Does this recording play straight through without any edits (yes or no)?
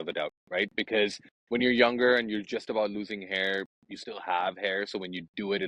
no